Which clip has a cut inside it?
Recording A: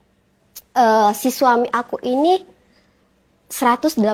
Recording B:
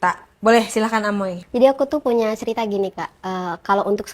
B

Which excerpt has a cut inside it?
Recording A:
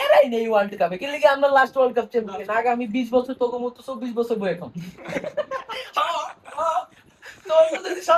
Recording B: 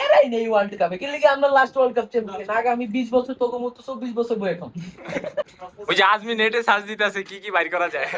B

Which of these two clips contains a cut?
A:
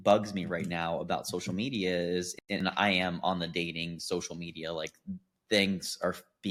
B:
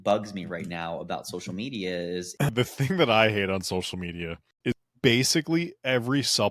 B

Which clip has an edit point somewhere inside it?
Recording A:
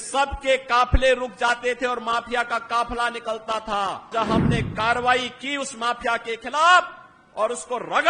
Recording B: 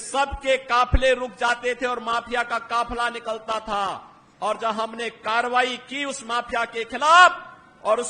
A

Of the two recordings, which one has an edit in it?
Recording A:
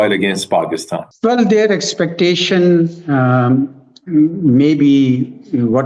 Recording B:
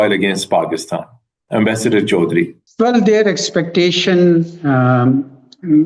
A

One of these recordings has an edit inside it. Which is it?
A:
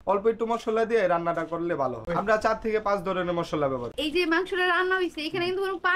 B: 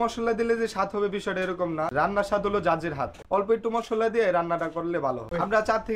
A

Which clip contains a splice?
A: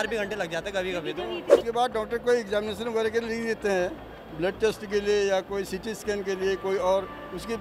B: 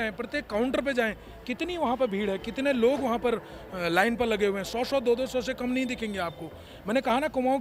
A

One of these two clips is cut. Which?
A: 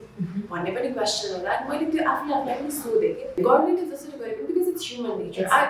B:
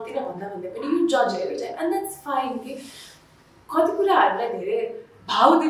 A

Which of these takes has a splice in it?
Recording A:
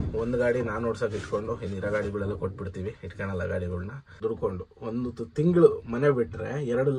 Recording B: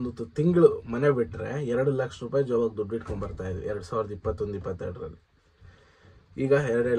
A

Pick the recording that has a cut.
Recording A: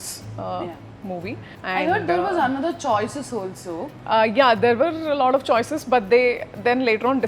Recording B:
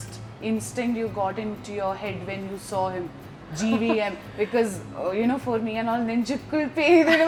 A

